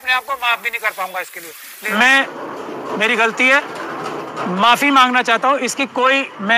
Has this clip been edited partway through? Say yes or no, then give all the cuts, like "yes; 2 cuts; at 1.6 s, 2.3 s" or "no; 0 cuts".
yes; 1 cut; at 1.9 s